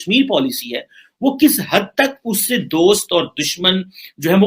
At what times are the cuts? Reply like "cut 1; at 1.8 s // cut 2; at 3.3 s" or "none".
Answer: none